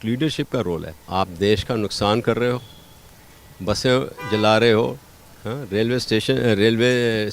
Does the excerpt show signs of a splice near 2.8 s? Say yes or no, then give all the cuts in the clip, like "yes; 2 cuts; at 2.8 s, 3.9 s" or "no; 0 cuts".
no; 1 cut; at 1.0 s